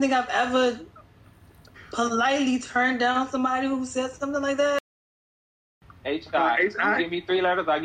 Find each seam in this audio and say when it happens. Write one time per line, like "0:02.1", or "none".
0:05.6